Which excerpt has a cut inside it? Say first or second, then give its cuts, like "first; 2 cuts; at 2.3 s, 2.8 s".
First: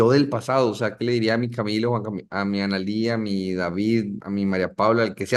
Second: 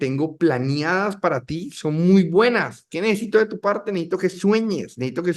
first; 1 cut; at 4.2 s